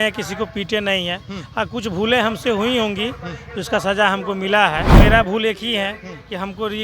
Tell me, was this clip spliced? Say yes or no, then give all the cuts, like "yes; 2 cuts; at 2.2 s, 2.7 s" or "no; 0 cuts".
yes; 1 cut; at 4.9 s